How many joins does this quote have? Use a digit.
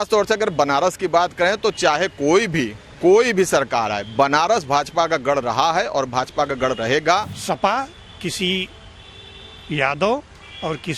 1